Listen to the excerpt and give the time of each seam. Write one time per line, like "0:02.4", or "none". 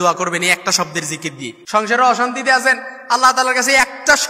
0:01.5